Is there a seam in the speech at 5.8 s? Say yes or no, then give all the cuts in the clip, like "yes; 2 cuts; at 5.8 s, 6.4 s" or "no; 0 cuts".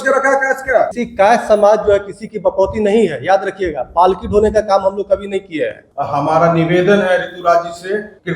yes; 2 cuts; at 1.0 s, 5.8 s